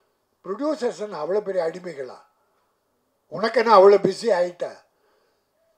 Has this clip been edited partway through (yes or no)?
no